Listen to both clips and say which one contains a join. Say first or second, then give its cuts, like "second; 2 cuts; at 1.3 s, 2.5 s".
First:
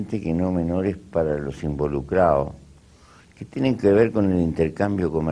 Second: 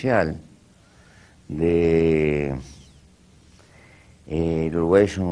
first; 1 cut; at 1.4 s